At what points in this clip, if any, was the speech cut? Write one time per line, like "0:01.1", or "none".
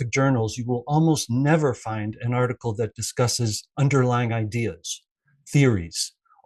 none